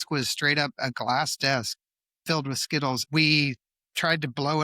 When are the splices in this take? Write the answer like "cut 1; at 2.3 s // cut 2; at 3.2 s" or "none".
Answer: cut 1; at 3.0 s